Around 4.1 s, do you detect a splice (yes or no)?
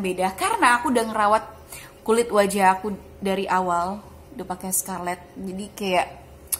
no